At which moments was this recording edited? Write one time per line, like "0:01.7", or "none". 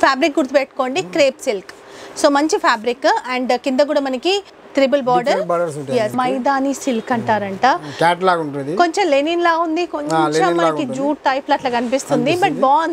0:04.6
0:06.1